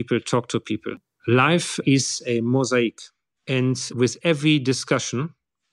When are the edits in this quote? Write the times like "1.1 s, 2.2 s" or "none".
1.0 s